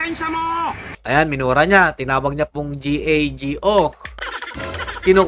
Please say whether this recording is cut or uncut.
uncut